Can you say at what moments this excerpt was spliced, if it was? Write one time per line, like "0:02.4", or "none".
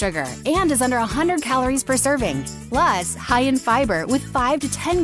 0:02.5